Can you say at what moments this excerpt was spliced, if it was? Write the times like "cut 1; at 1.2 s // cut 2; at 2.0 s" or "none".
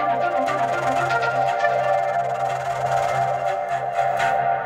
none